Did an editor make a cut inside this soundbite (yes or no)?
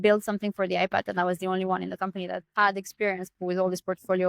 yes